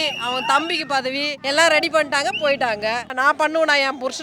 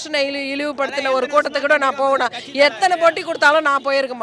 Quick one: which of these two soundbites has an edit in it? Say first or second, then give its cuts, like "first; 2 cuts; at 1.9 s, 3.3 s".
first; 2 cuts; at 1.3 s, 3.2 s